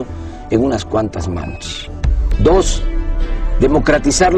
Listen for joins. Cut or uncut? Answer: uncut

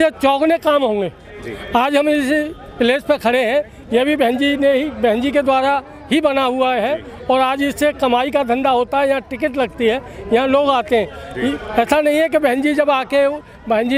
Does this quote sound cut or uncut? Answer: uncut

